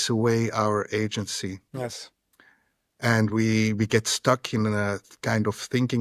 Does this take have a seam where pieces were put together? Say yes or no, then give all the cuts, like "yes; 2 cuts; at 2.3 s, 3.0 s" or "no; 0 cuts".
no; 0 cuts